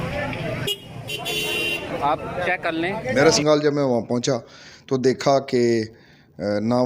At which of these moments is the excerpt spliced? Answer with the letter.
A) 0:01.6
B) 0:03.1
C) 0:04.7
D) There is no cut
B